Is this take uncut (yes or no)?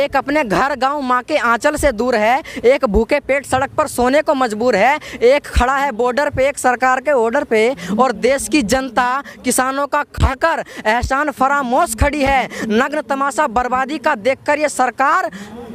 yes